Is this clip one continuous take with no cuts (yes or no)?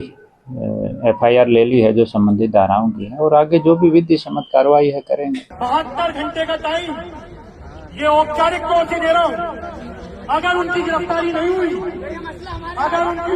no